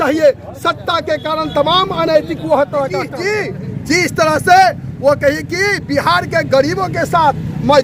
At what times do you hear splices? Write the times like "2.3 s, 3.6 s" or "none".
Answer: 3.1 s